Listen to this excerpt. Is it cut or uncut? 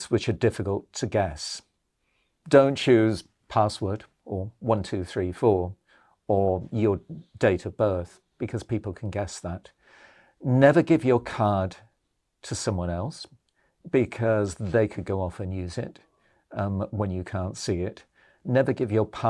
uncut